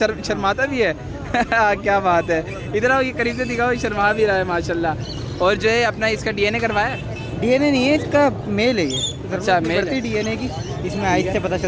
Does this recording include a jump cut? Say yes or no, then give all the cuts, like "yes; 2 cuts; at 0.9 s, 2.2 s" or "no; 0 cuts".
no; 0 cuts